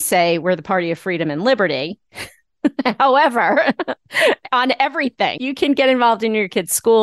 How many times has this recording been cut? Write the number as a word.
one